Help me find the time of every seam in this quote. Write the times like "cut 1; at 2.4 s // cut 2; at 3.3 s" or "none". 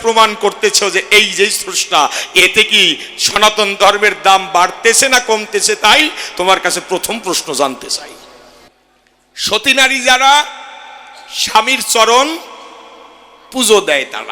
cut 1; at 8.7 s